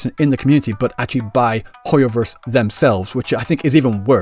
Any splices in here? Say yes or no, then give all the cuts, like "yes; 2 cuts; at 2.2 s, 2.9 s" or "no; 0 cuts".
no; 0 cuts